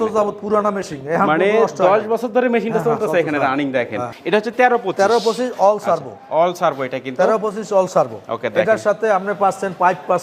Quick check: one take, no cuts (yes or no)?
no